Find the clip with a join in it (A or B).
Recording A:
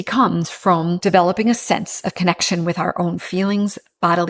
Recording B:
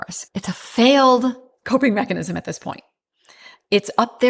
A